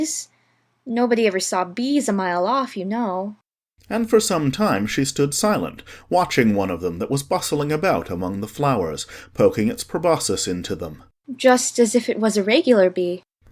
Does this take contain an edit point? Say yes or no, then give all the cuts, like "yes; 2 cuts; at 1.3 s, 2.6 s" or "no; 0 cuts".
yes; 1 cut; at 3.3 s